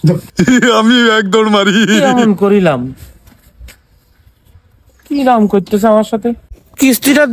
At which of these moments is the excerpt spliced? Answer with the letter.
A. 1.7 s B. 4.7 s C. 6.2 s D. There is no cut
D